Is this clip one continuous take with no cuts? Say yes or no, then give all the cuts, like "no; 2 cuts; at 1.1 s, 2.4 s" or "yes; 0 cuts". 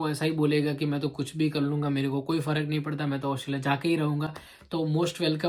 yes; 0 cuts